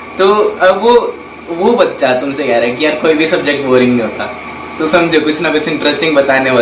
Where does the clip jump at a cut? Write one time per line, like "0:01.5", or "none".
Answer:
none